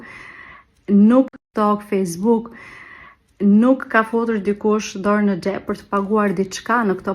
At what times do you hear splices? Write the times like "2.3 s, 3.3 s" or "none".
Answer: 1.3 s, 3.8 s